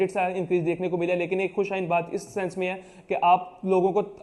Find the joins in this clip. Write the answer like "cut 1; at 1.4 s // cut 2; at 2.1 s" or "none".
none